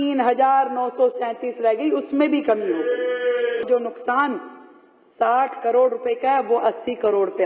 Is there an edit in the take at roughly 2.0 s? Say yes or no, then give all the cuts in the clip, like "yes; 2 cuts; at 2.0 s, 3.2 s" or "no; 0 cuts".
no; 1 cut; at 3.7 s